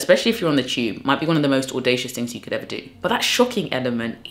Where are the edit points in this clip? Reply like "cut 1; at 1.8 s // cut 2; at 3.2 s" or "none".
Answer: cut 1; at 3.0 s